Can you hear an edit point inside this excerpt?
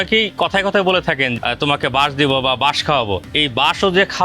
yes; 2 cuts; at 1.3 s, 3.3 s

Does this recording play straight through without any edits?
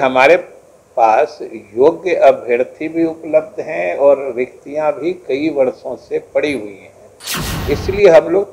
yes; 0 cuts

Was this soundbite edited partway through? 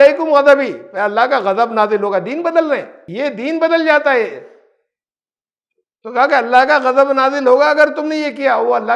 yes; 1 cut; at 3.1 s

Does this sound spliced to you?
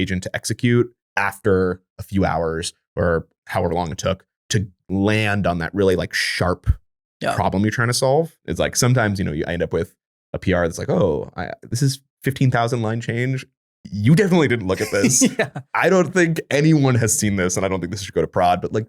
yes; 2 cuts; at 8.5 s, 12.1 s

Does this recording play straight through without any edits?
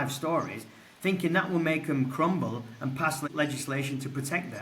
no; 1 cut; at 3.3 s

